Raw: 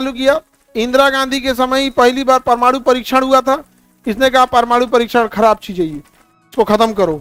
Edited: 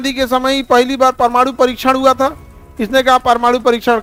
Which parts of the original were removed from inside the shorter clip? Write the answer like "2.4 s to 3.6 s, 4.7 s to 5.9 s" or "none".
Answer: none